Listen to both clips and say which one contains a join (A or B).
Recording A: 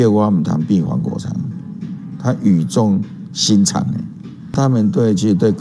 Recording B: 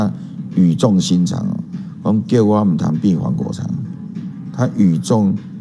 A